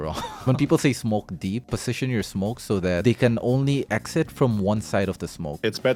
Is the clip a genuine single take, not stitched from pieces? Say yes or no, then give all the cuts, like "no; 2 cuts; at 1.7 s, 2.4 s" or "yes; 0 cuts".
yes; 0 cuts